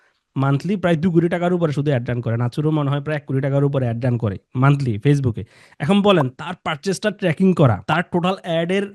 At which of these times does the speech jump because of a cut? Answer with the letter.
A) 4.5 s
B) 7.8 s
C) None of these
B